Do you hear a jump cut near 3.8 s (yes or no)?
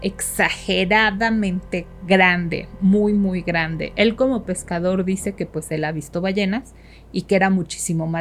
no